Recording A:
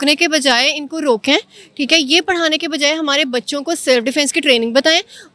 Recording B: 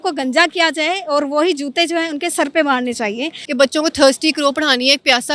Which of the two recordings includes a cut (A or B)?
B